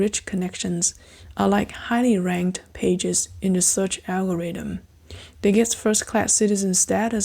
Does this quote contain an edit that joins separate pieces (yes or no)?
no